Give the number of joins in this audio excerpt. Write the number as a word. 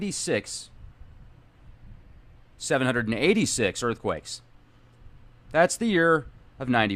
zero